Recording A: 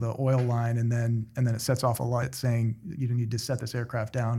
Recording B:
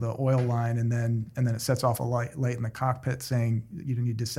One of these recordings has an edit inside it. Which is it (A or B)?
A